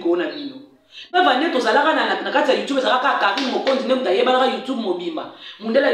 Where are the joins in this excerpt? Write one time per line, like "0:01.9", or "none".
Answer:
0:01.1